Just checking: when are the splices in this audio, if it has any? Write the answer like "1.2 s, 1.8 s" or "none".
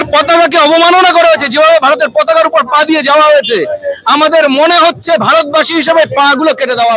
none